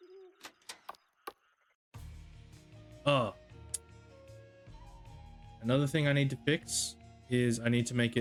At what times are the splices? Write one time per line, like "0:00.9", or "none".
none